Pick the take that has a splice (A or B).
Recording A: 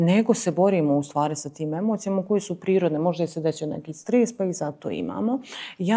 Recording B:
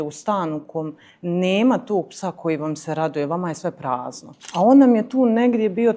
B